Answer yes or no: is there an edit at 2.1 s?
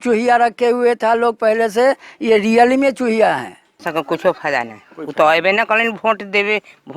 no